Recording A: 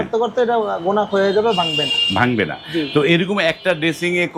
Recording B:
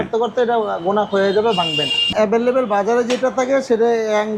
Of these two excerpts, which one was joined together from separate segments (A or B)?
B